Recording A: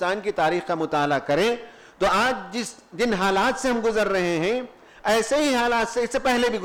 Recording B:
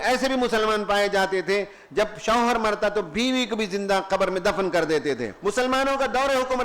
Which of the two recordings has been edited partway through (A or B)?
B